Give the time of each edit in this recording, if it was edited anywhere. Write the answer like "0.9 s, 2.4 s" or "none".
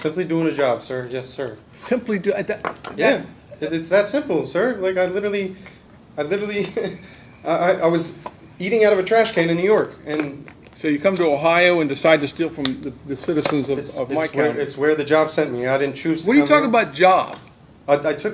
none